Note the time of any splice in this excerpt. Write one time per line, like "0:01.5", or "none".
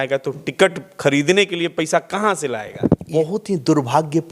0:03.1